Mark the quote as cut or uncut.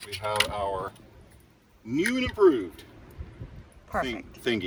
uncut